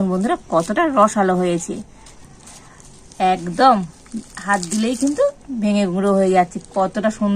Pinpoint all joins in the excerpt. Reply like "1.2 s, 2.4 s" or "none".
none

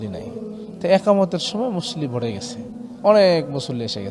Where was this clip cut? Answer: none

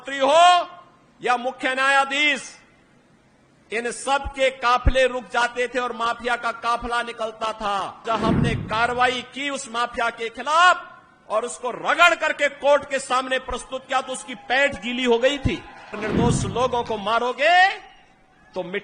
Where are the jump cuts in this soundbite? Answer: 8.0 s, 16.0 s

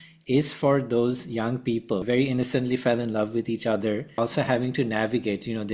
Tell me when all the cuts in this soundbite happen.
2.0 s, 4.2 s

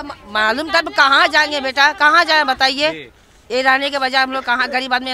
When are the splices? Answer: none

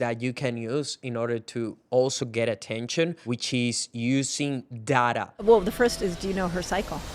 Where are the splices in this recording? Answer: 3.2 s, 5.3 s

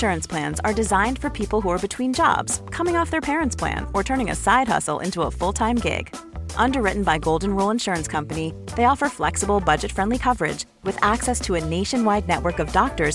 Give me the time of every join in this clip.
none

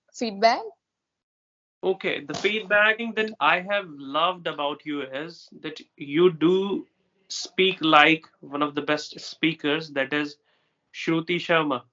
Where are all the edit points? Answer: 3.0 s

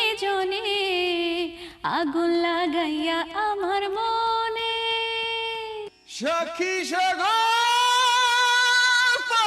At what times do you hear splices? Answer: 6.0 s

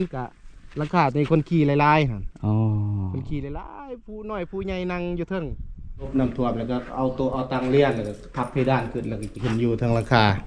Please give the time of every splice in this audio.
6.1 s

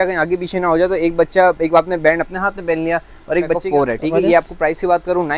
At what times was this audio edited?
3.6 s

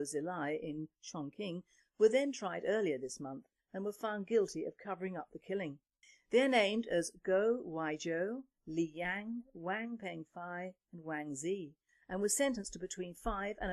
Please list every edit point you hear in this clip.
none

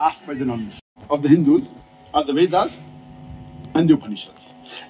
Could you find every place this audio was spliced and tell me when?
0.9 s

